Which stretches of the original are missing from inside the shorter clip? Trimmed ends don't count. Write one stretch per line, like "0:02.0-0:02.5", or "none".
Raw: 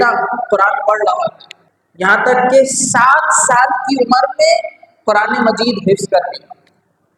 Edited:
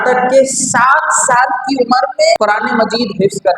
0:04.6-0:05.0